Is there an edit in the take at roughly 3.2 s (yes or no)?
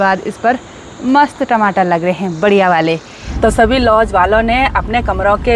yes